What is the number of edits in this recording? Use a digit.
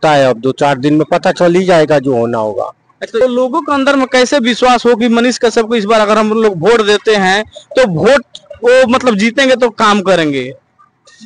1